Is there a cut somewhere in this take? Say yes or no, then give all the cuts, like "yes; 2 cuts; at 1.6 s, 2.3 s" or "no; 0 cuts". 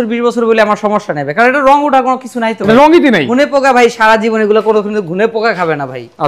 yes; 1 cut; at 3.3 s